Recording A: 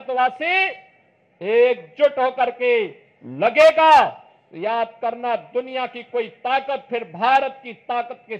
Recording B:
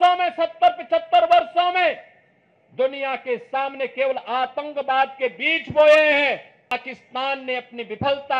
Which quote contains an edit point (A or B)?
B